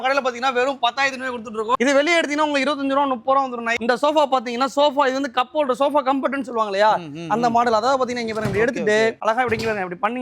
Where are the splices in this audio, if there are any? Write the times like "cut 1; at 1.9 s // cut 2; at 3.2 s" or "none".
cut 1; at 1.8 s // cut 2; at 3.8 s // cut 3; at 9.2 s